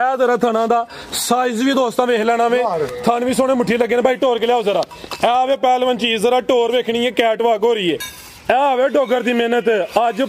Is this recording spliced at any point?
yes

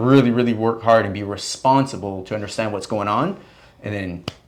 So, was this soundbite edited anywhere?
no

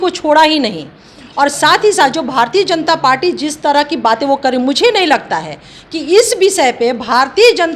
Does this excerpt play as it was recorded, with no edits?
yes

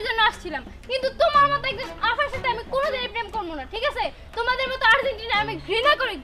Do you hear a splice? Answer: no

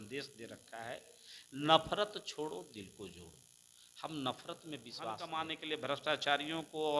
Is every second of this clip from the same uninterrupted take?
no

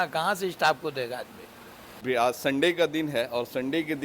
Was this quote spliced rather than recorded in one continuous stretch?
yes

